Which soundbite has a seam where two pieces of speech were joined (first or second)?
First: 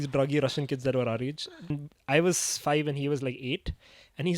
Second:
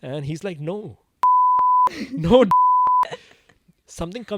first